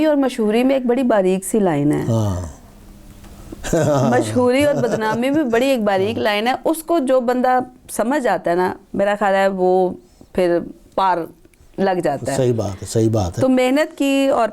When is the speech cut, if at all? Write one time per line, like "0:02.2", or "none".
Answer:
none